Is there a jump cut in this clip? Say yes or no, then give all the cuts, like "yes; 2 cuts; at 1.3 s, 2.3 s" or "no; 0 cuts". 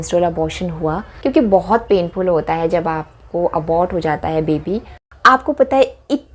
yes; 2 cuts; at 1.1 s, 4.9 s